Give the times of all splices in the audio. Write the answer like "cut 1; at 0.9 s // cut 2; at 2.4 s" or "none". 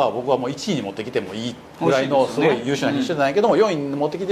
none